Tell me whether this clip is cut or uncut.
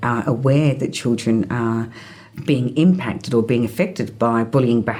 uncut